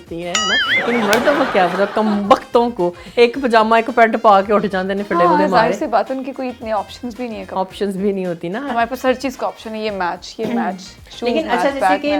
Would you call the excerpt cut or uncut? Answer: uncut